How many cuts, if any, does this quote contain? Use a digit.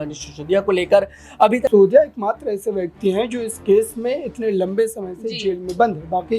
1